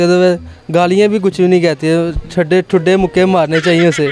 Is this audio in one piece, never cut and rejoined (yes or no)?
yes